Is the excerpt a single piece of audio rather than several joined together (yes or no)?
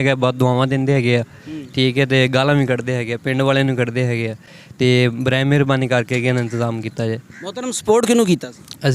yes